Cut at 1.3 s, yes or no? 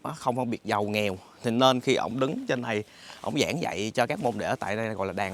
no